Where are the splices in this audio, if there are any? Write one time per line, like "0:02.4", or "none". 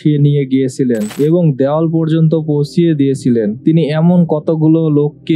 none

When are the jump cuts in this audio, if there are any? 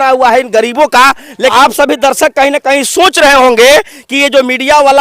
0:01.5

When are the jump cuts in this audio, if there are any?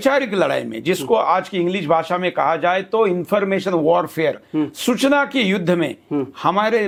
none

